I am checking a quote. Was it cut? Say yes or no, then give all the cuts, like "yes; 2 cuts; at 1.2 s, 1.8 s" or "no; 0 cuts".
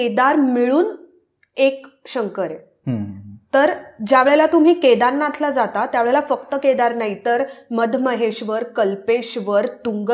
no; 0 cuts